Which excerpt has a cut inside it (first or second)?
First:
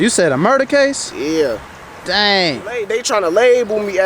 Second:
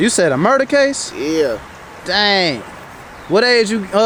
first